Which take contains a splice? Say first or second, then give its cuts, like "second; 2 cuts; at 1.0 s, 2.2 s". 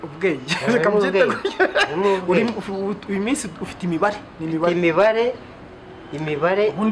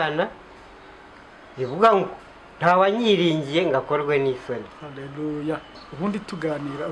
second; 1 cut; at 5.8 s